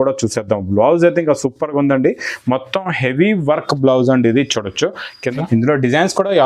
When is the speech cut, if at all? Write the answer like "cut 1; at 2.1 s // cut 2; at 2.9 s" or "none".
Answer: cut 1; at 5.1 s